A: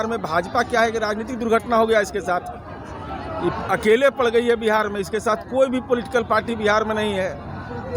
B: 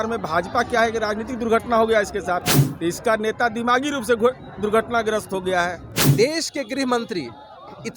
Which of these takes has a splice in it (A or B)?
B